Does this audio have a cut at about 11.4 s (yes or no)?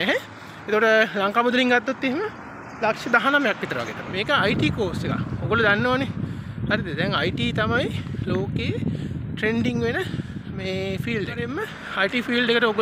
yes